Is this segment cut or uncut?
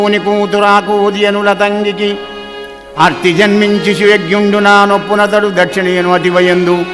uncut